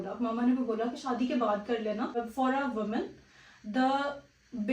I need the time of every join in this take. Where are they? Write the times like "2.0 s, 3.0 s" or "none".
2.2 s